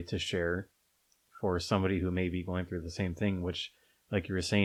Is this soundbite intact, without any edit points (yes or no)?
yes